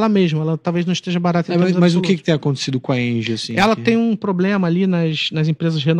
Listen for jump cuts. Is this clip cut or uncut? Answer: uncut